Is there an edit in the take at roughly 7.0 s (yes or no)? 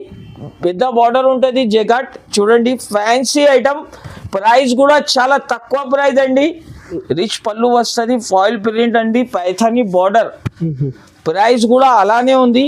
yes